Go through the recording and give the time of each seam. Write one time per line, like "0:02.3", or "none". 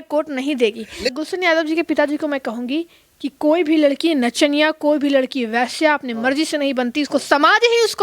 0:01.1